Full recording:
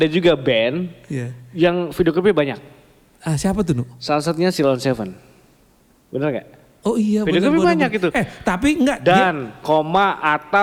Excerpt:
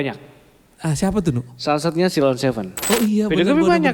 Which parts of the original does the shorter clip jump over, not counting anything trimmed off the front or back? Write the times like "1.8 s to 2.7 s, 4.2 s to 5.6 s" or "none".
5.1 s to 6.7 s